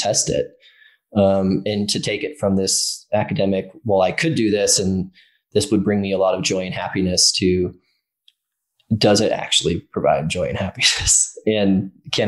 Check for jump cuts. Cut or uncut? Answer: uncut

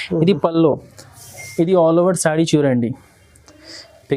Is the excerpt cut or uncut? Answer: uncut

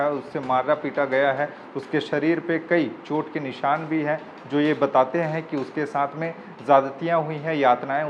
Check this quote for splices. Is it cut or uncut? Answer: uncut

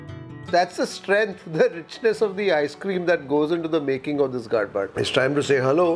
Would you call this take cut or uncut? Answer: cut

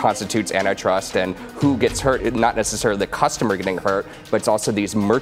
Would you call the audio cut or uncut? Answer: cut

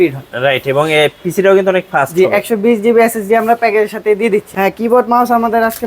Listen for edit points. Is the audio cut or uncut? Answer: cut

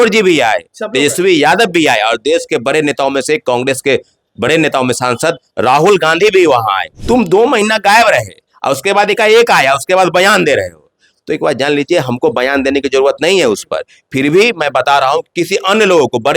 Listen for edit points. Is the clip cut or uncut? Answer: cut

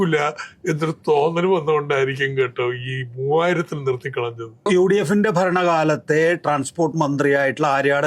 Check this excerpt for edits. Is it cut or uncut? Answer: cut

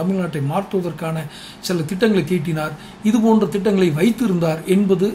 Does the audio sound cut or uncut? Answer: uncut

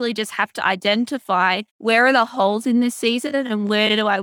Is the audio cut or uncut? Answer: cut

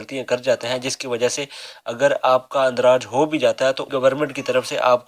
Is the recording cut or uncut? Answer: uncut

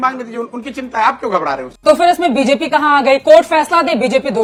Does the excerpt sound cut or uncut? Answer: uncut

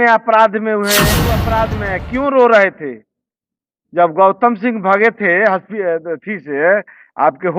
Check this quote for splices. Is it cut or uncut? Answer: cut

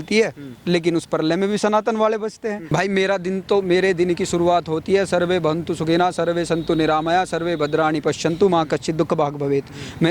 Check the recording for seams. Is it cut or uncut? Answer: cut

